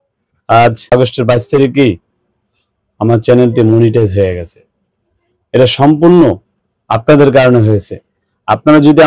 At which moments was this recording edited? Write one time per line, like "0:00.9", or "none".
0:00.9